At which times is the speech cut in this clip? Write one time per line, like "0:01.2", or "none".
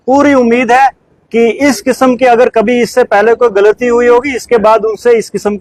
none